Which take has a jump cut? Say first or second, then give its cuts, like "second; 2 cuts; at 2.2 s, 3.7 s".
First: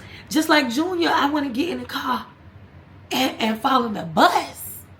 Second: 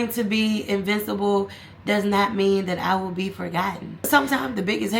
second; 1 cut; at 4.1 s